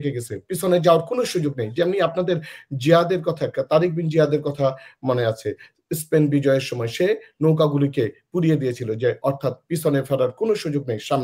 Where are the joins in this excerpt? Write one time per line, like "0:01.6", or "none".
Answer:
none